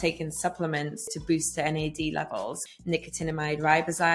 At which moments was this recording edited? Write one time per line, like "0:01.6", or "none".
0:01.1
0:02.6